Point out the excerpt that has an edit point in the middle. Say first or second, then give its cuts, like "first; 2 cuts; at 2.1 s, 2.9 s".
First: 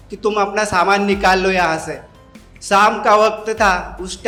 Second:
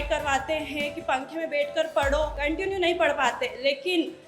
second; 1 cut; at 2.4 s